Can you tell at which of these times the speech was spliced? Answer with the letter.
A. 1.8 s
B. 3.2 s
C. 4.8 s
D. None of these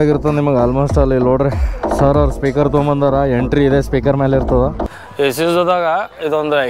C